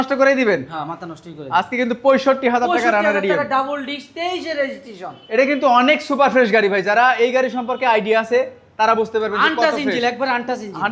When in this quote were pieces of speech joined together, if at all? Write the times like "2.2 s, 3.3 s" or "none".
none